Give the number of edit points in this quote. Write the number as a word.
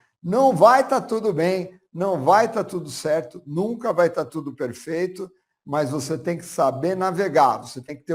zero